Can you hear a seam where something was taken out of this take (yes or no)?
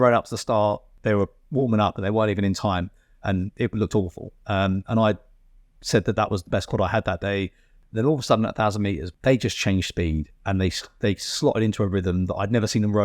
yes